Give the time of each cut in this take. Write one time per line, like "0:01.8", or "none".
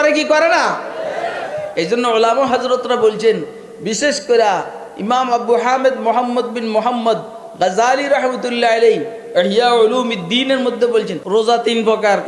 0:11.2